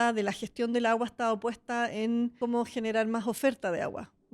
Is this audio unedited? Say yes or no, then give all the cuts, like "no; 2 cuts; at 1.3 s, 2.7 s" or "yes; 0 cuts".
no; 1 cut; at 2.3 s